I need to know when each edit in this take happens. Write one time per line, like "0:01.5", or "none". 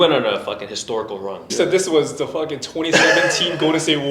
0:01.5